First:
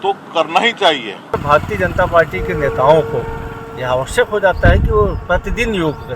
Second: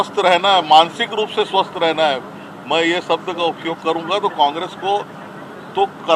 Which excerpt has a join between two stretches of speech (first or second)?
first